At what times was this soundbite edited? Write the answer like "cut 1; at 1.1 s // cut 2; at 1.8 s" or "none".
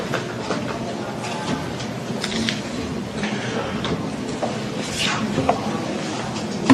none